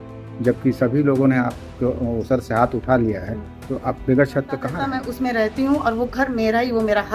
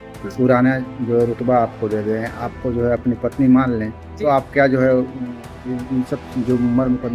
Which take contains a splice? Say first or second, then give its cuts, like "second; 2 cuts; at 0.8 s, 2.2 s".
first; 1 cut; at 5.0 s